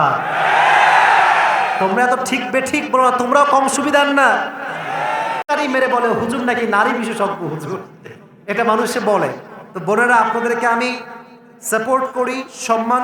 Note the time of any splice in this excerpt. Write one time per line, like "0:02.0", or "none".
0:05.5